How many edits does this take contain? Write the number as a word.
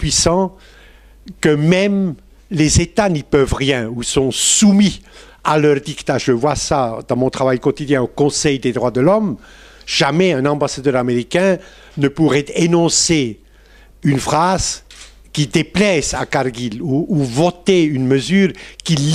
one